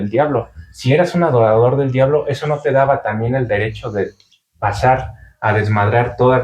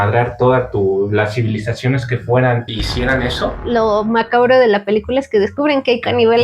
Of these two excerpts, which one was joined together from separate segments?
second; 1 cut; at 3.6 s

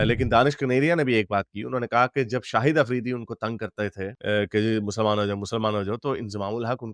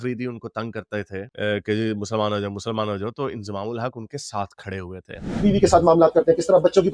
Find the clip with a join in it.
second; 1 cut; at 5.3 s

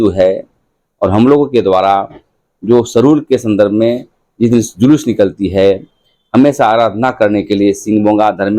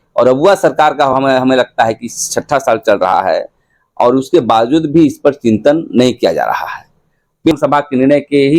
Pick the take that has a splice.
second; 1 cut; at 7.5 s

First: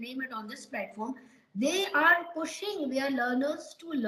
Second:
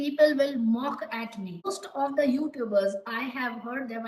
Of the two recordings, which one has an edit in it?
second; 1 cut; at 1.8 s

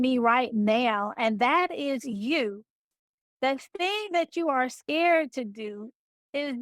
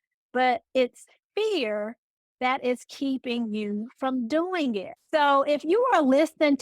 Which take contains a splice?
second; 1 cut; at 5.0 s

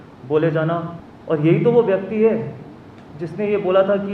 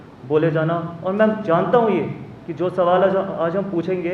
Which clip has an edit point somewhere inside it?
first; 1 cut; at 0.9 s

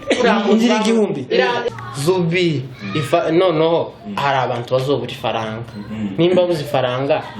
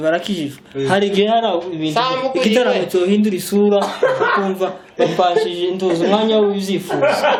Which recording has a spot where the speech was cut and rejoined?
first; 1 cut; at 1.6 s

